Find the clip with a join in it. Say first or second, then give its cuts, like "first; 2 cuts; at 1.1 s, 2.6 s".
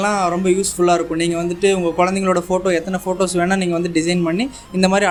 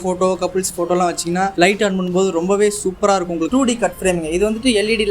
second; 2 cuts; at 1.5 s, 3.5 s